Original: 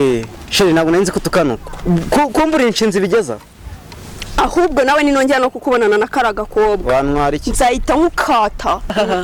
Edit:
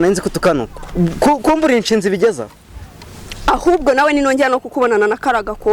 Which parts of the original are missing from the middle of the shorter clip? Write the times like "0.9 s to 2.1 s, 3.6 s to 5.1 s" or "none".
none